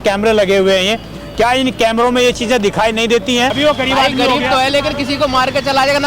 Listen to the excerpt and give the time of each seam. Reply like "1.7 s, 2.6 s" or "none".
3.6 s